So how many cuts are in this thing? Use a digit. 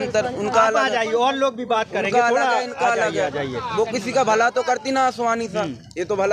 0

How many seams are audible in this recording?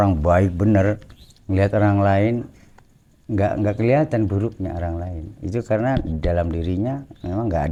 0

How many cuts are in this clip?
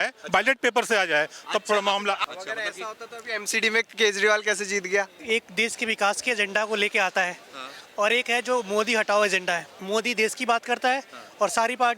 3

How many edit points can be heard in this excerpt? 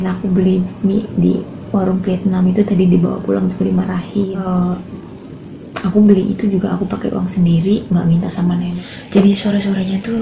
2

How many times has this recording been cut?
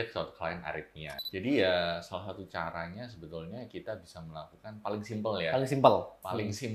1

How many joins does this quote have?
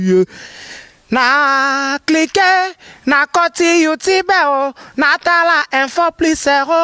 0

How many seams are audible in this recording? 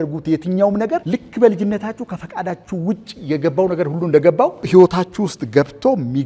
2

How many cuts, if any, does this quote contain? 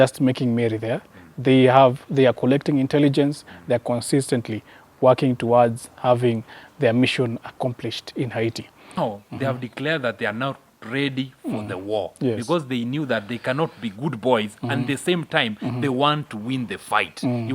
1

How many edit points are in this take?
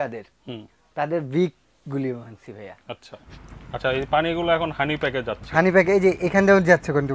1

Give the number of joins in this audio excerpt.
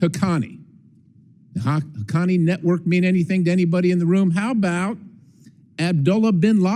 0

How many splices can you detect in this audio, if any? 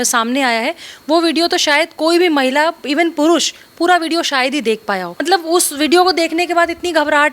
1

